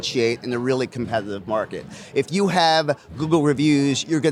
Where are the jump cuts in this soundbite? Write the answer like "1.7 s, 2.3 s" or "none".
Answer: none